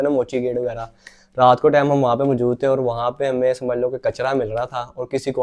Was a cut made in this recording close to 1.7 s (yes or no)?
no